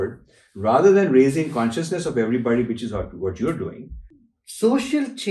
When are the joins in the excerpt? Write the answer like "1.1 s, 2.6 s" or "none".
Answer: 4.0 s